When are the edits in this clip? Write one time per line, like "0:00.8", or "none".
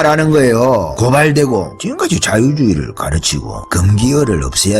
0:00.9
0:01.8